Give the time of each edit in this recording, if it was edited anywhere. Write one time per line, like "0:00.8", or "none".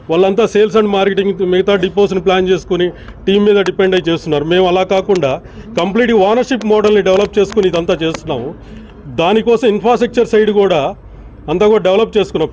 none